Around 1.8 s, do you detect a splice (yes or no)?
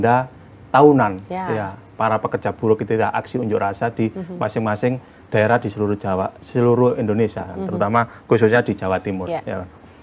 no